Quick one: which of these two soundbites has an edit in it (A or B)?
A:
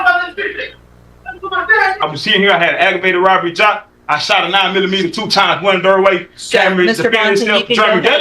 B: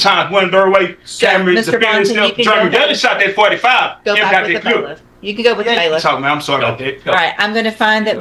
A